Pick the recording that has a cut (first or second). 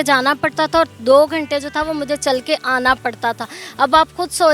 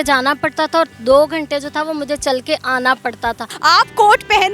second